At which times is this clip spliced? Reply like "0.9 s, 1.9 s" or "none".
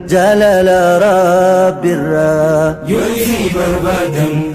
none